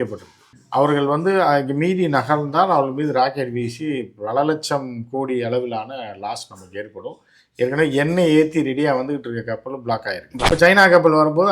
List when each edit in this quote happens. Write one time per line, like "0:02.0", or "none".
0:10.5